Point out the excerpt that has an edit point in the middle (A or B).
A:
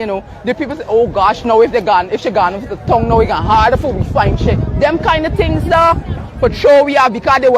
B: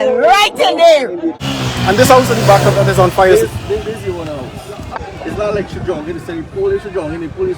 B